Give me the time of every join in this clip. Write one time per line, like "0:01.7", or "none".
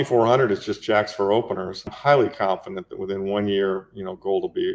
0:01.9